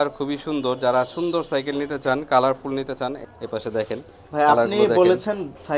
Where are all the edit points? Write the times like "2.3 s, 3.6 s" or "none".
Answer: 3.2 s

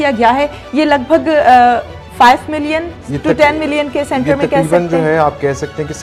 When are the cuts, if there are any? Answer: none

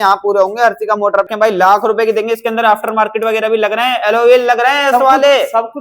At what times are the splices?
1.3 s

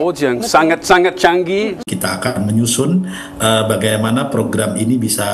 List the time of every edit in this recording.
1.8 s

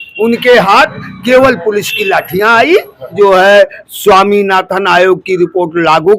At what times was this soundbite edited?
3.1 s

